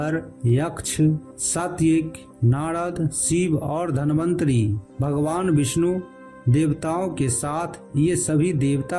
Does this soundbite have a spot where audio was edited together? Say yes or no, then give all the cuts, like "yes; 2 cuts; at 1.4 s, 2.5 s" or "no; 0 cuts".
no; 0 cuts